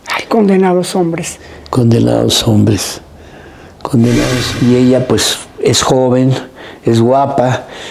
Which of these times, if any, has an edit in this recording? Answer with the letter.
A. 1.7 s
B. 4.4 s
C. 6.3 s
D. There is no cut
B